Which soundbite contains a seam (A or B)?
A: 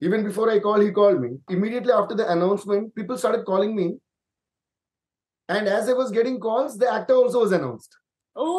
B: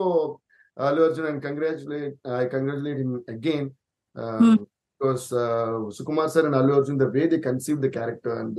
A